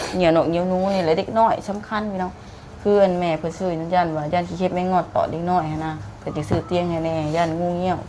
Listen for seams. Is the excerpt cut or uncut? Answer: uncut